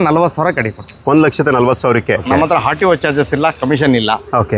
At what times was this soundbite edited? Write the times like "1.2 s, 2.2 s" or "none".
2.2 s